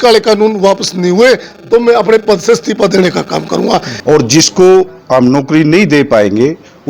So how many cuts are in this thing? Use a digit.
1